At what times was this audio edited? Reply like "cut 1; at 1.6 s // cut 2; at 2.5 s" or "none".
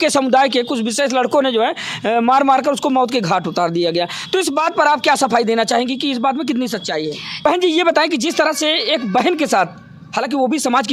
cut 1; at 7.3 s